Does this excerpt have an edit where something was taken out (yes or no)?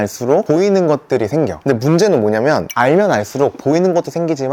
no